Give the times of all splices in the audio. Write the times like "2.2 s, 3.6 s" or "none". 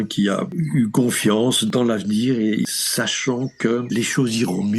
1.7 s, 2.7 s, 3.9 s